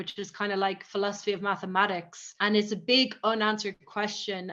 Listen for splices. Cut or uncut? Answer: uncut